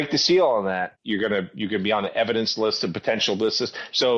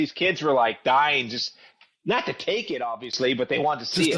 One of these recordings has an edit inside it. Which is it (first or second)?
first